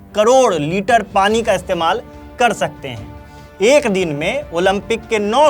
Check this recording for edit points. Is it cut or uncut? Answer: uncut